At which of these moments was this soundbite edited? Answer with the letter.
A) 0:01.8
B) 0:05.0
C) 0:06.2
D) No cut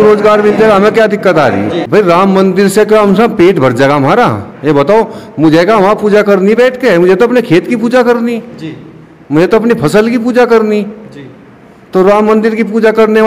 A